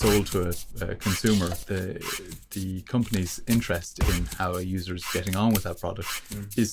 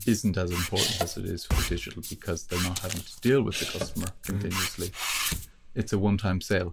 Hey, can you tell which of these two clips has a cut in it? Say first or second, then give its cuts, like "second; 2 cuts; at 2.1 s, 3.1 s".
first; 1 cut; at 1.6 s